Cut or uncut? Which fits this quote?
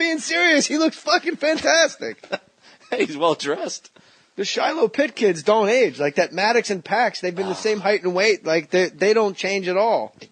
cut